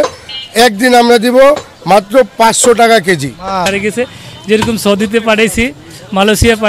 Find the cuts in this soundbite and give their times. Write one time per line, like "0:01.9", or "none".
0:03.7